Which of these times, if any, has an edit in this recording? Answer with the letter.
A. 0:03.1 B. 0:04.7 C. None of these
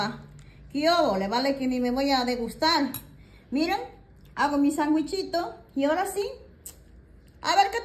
C